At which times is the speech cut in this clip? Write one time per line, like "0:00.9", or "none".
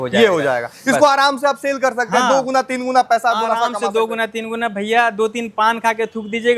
none